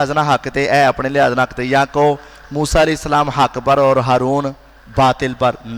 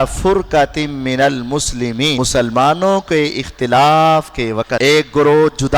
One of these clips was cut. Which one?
second; 2 cuts; at 2.2 s, 4.7 s

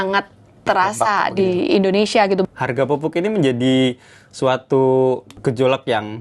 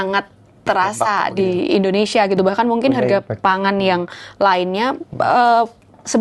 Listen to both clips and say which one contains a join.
first; 2 cuts; at 2.4 s, 5.3 s

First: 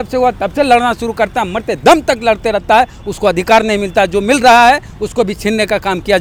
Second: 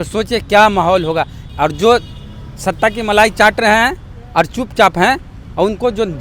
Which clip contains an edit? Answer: second; 1 cut; at 1.4 s

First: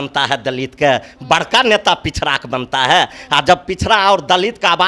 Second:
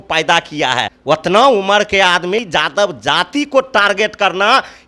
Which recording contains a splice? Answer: second; 2 cuts; at 0.9 s, 2.5 s

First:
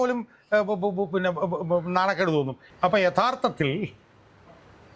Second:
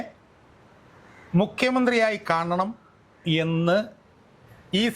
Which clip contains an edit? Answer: first; 1 cut; at 2.6 s

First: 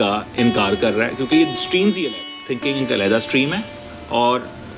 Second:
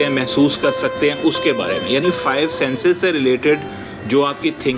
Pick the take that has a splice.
first; 1 cut; at 2.3 s

